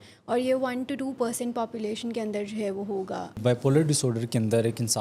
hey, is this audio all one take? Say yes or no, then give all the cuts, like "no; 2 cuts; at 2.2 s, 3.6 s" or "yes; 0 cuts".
no; 1 cut; at 3.4 s